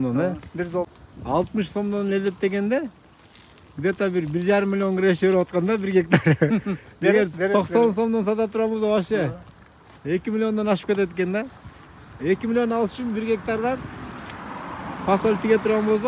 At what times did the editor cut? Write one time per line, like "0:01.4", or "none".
0:00.9